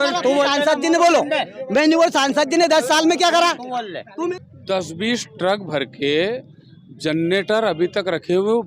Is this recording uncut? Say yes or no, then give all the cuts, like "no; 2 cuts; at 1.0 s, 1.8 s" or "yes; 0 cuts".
no; 1 cut; at 4.4 s